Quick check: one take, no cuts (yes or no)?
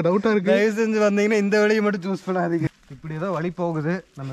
no